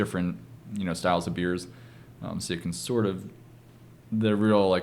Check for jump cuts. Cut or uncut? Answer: uncut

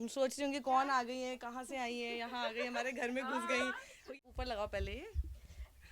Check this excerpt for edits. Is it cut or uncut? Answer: cut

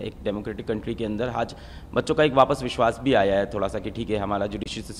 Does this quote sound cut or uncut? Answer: uncut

